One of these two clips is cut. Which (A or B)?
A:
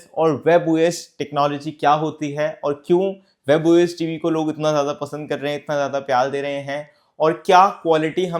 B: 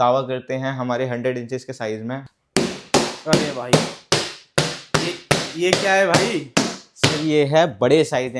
B